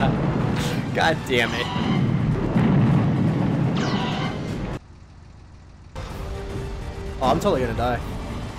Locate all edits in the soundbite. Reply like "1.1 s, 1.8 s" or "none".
6.0 s